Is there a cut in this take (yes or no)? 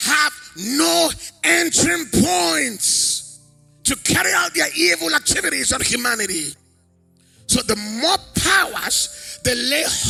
no